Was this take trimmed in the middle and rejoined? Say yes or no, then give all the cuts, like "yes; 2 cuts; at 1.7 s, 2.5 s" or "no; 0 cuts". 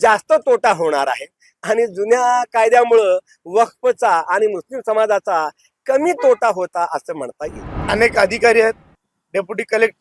yes; 1 cut; at 7.8 s